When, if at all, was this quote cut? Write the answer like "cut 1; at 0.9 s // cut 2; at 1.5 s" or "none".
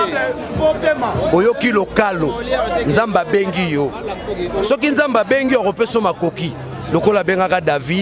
none